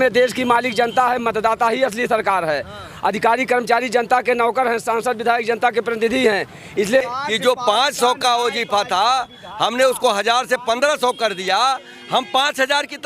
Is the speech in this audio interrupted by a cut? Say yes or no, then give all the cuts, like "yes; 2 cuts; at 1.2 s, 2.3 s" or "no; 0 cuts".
yes; 1 cut; at 7.0 s